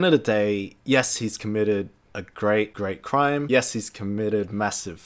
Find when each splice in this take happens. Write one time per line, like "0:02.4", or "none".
0:03.4